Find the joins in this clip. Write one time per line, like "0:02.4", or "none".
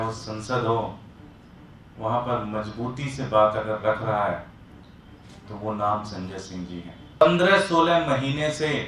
0:07.2

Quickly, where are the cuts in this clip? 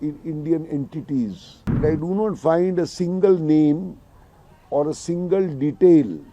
0:01.8

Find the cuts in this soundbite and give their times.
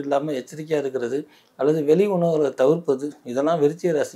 none

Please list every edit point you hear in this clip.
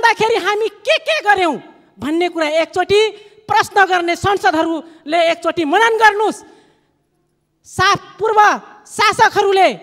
none

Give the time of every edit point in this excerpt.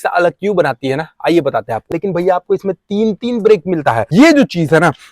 0:02.0
0:04.0

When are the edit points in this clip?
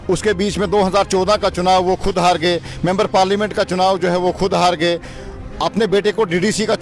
none

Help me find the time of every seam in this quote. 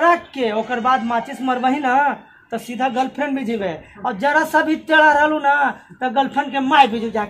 none

